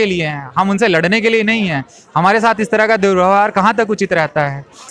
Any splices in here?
no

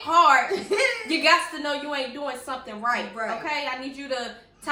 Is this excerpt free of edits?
yes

